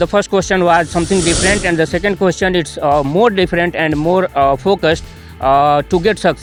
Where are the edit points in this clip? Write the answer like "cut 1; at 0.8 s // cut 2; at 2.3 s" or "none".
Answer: none